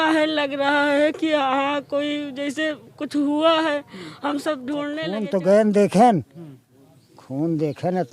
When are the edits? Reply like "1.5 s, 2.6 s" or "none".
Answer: 5.0 s